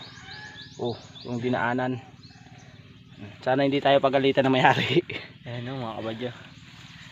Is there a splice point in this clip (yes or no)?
no